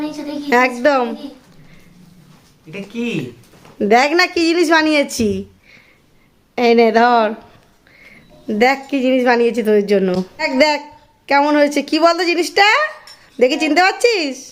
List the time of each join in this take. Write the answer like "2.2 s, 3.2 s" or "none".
none